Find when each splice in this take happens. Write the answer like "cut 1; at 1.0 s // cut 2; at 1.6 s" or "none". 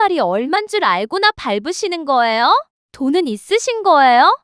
cut 1; at 2.8 s

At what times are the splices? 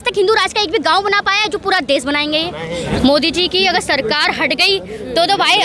cut 1; at 2.9 s

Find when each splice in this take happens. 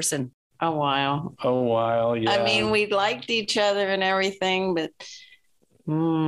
none

